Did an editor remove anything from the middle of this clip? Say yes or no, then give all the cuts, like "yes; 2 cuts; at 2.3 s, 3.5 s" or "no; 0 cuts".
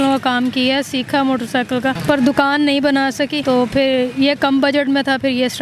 yes; 2 cuts; at 2.0 s, 3.4 s